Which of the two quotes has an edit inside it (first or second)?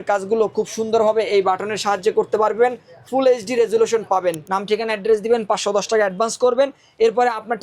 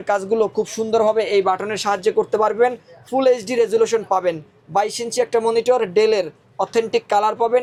first